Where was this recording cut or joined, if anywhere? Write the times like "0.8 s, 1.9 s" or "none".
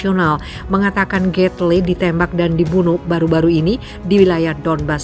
none